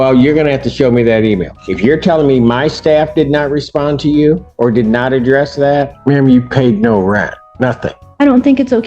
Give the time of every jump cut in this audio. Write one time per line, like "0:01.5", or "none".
0:01.6
0:04.5
0:05.9
0:07.7